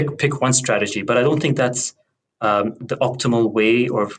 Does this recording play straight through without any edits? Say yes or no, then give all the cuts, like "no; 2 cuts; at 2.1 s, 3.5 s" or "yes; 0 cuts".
yes; 0 cuts